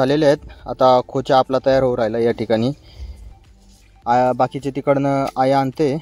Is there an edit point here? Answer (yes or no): no